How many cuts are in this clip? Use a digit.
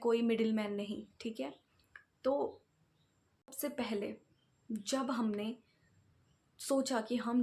1